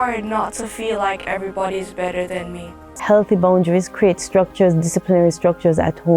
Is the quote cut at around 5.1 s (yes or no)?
no